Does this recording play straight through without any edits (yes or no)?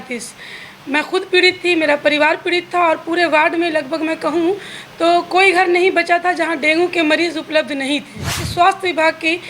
no